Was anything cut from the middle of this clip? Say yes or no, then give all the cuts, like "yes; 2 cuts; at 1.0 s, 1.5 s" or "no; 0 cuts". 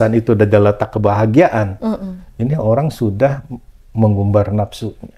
no; 0 cuts